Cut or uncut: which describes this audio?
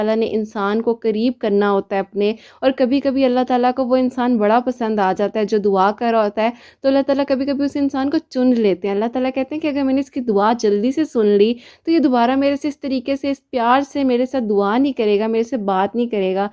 uncut